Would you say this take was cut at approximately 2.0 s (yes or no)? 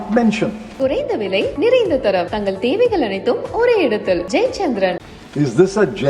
no